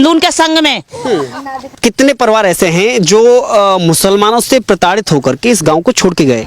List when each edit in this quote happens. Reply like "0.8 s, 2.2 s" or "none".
1.7 s